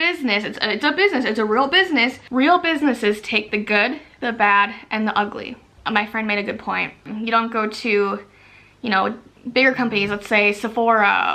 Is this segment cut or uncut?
uncut